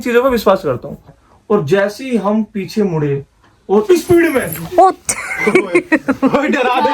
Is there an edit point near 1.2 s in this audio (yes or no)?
yes